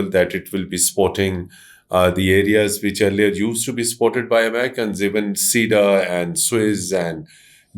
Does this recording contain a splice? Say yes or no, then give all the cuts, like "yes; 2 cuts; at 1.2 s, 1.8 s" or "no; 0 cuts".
no; 0 cuts